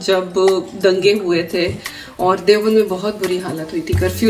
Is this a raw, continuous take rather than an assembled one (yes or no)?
yes